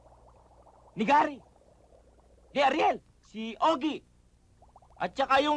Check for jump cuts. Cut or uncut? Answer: uncut